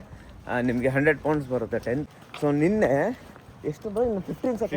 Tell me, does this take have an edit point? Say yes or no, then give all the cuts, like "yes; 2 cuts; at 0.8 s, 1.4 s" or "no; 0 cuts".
yes; 1 cut; at 2.0 s